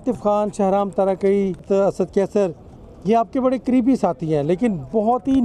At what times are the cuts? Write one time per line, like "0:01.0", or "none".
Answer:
0:01.6